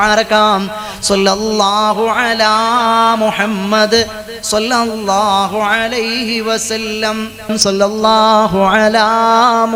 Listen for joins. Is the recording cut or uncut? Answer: uncut